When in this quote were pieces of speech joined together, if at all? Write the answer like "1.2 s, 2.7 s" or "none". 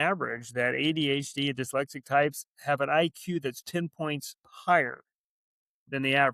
none